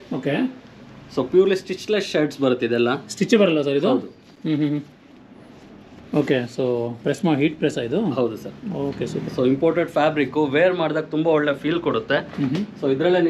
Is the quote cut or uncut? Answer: uncut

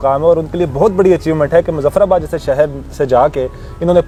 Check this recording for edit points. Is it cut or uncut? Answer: uncut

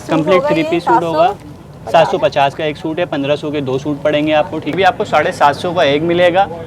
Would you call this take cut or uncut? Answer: cut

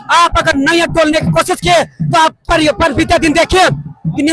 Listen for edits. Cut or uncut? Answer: uncut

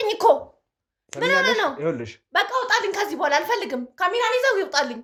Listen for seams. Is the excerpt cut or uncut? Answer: uncut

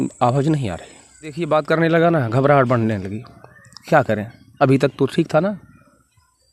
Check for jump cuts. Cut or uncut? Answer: cut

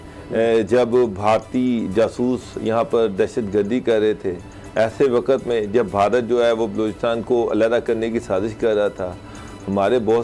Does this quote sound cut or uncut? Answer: uncut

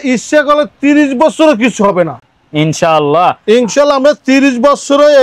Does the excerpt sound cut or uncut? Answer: uncut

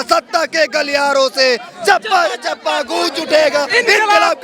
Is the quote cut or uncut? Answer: uncut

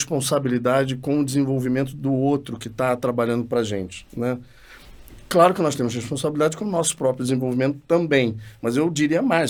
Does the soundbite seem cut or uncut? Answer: uncut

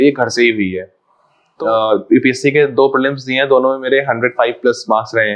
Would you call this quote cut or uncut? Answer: cut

